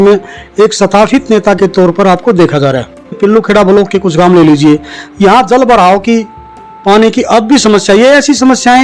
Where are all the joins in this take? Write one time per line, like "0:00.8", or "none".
0:03.4

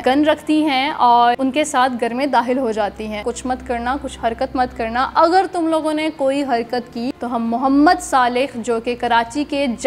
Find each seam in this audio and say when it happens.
0:01.4
0:03.2
0:07.1

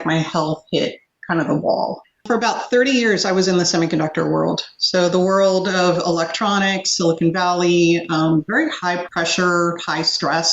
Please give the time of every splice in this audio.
0:02.2
0:09.1

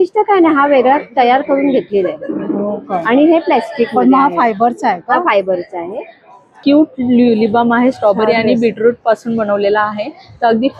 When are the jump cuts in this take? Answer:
0:06.6

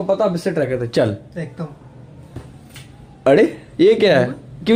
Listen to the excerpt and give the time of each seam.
none

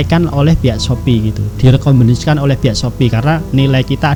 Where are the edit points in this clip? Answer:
none

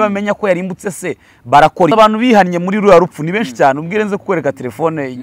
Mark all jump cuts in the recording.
0:01.9

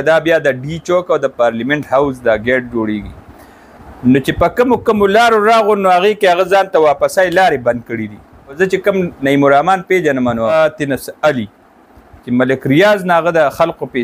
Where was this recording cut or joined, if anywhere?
0:08.6
0:10.5

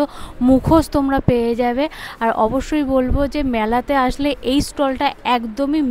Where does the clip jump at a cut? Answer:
none

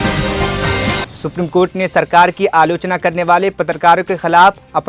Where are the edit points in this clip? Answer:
0:01.1

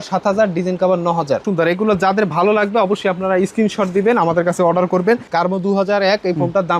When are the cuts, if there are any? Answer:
0:01.5
0:05.3

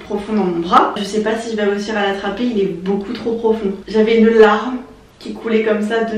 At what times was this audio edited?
0:01.0
0:03.8

